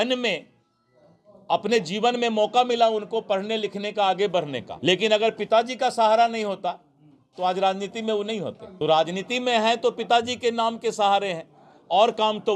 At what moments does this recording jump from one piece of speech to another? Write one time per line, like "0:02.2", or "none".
0:04.7
0:08.6